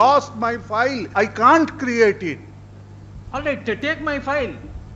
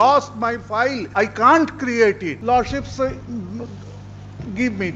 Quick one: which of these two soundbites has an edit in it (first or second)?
second